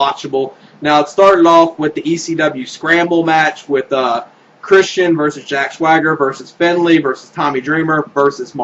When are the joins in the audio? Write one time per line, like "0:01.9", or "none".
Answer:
0:05.8